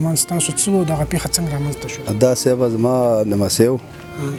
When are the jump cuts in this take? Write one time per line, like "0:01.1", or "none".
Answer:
none